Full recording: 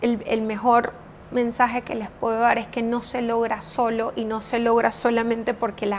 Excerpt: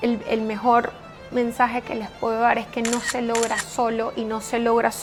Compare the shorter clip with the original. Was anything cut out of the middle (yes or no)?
no